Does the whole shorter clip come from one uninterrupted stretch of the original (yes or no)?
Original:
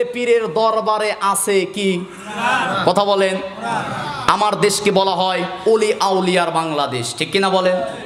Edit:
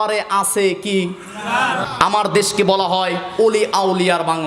no